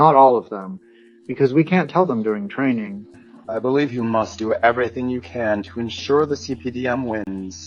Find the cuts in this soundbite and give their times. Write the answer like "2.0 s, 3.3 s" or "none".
3.1 s

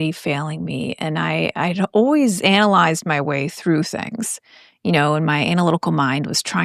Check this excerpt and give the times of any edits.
none

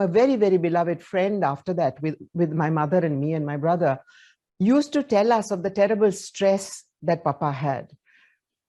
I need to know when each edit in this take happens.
none

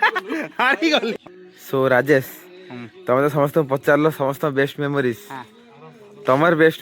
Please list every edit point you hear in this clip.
1.1 s

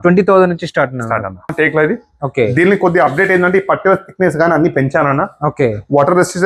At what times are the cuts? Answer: 1.5 s

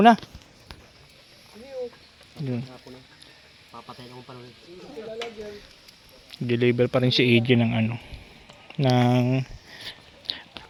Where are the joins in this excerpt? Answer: none

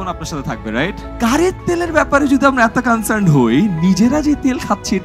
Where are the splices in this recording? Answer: 1.1 s

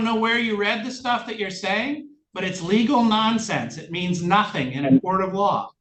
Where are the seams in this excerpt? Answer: none

